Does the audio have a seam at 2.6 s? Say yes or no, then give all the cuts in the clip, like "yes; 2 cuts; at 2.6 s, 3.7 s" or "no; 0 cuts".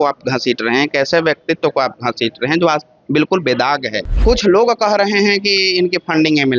no; 1 cut; at 4.1 s